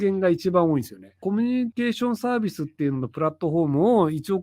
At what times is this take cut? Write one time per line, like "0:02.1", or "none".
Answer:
0:01.4